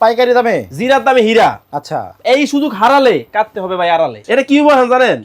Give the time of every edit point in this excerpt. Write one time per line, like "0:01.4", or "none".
0:04.2

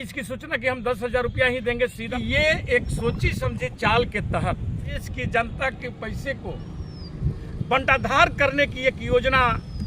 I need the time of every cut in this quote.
0:02.1
0:05.0

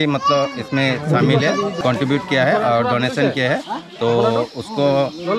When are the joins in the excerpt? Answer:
0:01.8

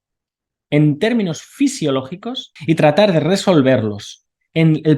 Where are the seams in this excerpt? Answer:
0:02.5

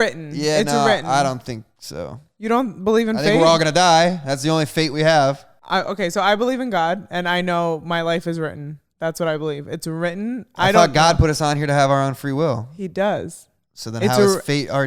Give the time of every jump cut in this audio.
0:05.5

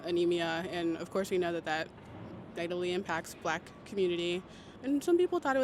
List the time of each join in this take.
0:04.7

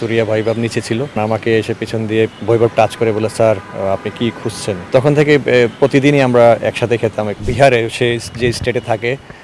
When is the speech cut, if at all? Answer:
0:01.1
0:02.4
0:04.8
0:07.4

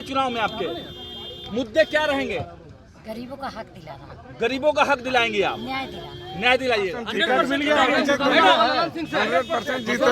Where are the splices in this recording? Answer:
0:07.0

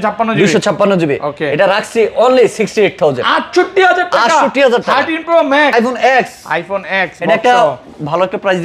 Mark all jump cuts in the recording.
0:05.7

